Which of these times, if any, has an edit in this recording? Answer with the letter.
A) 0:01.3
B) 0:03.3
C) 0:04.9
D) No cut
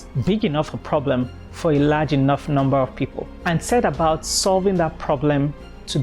B